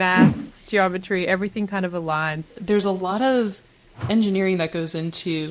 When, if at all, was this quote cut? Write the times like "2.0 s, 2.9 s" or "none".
2.4 s, 4.0 s